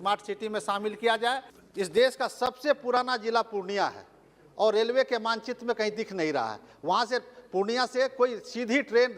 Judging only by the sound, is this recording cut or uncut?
cut